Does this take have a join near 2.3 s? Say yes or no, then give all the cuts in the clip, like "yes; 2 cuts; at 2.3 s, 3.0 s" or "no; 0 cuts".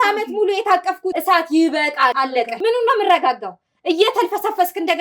yes; 2 cuts; at 1.2 s, 2.3 s